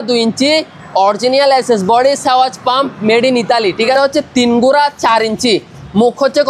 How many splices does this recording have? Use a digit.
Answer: 1